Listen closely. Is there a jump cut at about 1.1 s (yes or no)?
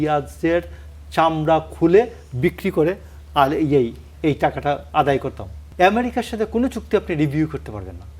no